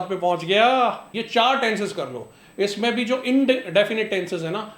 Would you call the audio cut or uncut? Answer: cut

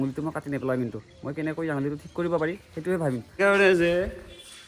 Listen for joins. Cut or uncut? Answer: cut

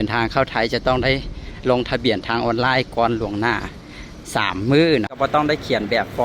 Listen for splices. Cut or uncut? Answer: cut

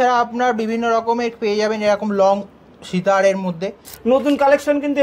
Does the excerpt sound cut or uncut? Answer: cut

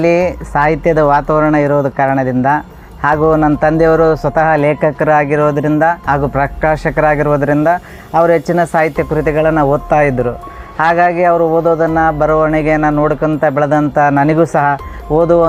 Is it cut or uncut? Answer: uncut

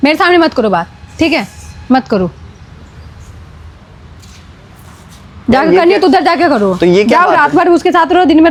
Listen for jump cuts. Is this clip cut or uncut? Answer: uncut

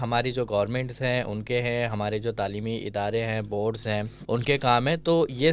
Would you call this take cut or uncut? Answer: cut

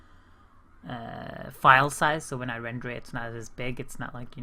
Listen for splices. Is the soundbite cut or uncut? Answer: cut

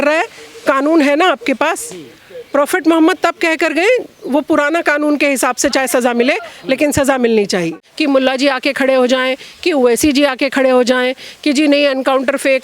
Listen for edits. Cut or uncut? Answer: cut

